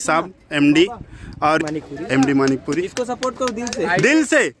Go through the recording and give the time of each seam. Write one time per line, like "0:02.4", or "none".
0:01.6